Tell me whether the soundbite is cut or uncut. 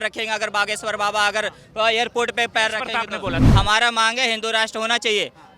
cut